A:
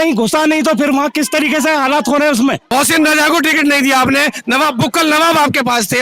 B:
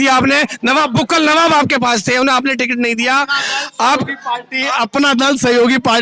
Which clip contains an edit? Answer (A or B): A